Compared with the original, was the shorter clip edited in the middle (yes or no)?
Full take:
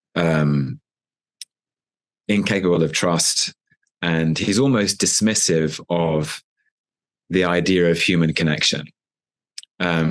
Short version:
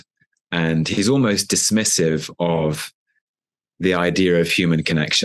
no